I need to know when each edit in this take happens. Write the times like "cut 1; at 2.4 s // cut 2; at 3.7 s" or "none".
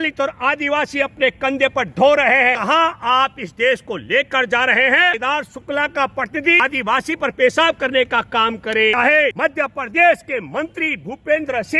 cut 1; at 2.6 s // cut 2; at 5.2 s // cut 3; at 6.6 s // cut 4; at 9.1 s

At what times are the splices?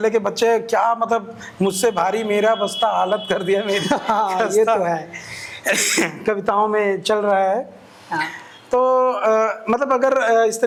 none

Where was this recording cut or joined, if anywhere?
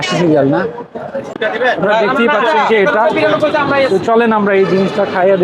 cut 1; at 1.4 s

